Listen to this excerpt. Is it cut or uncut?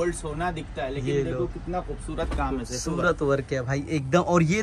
uncut